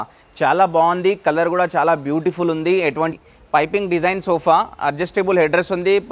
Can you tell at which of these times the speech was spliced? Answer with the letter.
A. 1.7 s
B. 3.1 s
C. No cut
B